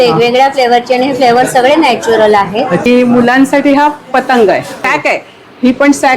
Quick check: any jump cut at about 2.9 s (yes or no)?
yes